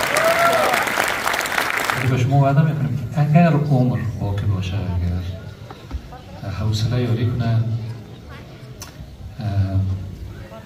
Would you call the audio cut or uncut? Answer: cut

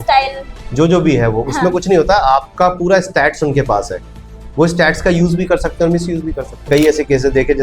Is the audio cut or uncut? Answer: cut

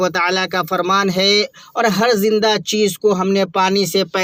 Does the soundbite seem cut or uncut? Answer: uncut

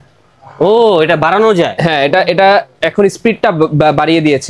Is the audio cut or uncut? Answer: uncut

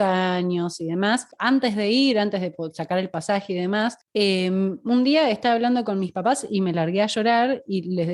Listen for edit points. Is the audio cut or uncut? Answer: cut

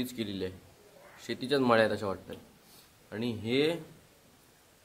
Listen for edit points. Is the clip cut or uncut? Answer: uncut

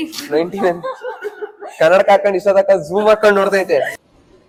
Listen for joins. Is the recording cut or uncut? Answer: uncut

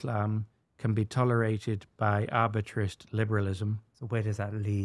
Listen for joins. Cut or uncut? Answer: cut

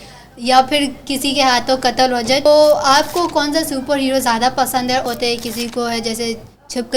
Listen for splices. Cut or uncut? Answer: cut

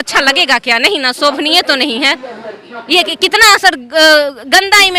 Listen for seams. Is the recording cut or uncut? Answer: uncut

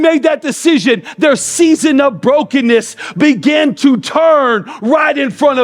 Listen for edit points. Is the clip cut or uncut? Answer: uncut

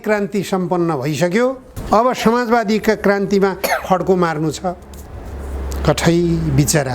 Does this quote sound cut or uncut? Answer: cut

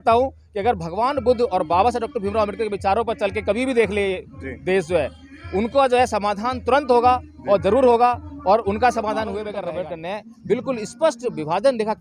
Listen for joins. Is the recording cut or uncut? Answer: cut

